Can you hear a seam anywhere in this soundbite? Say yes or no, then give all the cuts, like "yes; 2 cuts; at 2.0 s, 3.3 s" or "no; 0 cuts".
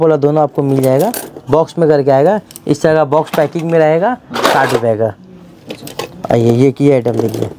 no; 0 cuts